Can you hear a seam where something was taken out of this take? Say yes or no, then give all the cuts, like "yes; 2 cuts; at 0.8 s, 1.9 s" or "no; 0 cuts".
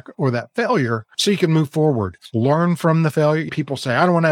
yes; 3 cuts; at 1.1 s, 2.2 s, 3.5 s